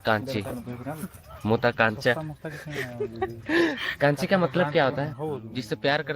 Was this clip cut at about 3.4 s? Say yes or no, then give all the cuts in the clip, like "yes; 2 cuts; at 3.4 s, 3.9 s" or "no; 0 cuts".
no; 1 cut; at 5.2 s